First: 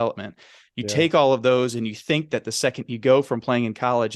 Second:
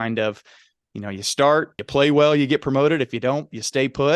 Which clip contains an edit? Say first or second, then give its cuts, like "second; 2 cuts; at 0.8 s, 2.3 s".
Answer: second; 1 cut; at 1.8 s